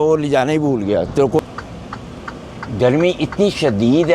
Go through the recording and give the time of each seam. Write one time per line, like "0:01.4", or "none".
0:01.4